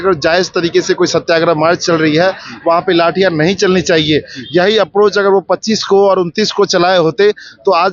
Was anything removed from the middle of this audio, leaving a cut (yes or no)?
no